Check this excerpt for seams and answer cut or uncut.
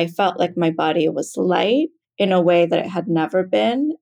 cut